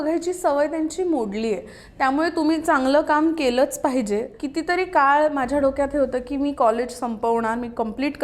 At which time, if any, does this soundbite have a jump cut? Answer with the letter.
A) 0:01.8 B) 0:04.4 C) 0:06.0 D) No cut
B